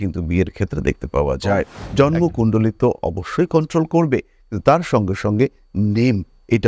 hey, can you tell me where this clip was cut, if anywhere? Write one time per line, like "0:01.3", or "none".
0:01.8